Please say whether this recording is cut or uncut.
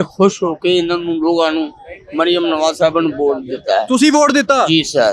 uncut